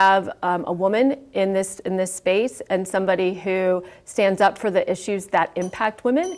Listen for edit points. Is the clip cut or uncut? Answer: uncut